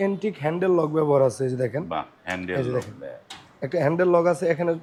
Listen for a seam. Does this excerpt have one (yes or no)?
no